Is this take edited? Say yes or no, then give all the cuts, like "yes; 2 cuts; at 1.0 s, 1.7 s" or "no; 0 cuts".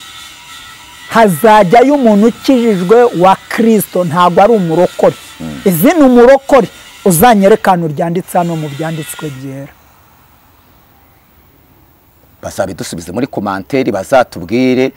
no; 0 cuts